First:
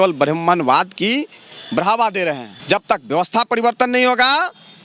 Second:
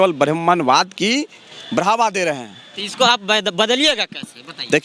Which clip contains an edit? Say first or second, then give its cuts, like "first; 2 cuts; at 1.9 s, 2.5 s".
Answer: first; 1 cut; at 2.5 s